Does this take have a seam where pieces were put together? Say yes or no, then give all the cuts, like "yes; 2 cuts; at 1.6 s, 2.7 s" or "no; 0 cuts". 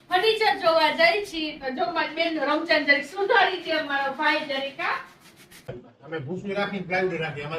yes; 1 cut; at 5.9 s